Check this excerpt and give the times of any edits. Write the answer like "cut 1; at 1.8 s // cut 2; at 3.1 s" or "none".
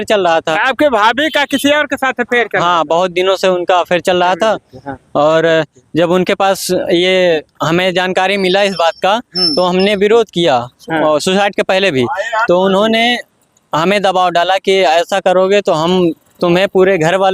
none